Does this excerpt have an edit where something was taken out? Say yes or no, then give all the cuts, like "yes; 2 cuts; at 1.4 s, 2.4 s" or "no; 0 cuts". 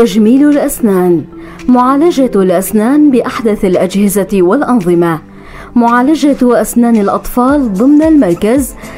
no; 0 cuts